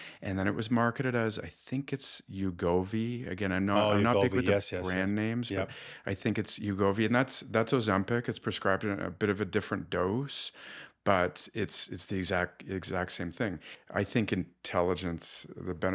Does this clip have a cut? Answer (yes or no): yes